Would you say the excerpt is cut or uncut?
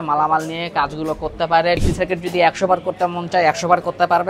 cut